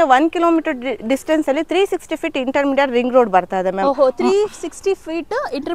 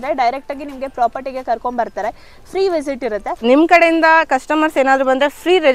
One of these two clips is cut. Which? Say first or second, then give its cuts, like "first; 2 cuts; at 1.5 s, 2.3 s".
second; 1 cut; at 3.4 s